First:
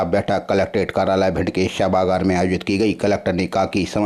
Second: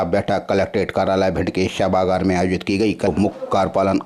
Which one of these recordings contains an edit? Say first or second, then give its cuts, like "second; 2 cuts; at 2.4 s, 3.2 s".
second; 1 cut; at 3.1 s